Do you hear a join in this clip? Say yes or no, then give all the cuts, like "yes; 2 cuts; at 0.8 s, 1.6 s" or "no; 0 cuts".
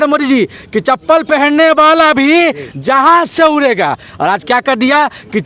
no; 0 cuts